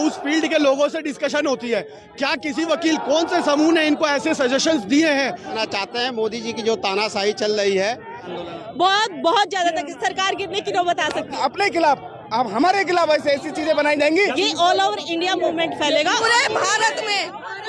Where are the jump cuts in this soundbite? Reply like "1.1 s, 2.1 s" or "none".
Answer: 5.6 s, 8.3 s, 11.4 s, 14.3 s, 16.2 s